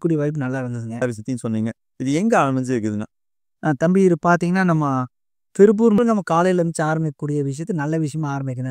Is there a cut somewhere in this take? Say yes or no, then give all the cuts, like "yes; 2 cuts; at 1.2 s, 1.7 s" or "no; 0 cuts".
yes; 2 cuts; at 1.0 s, 6.0 s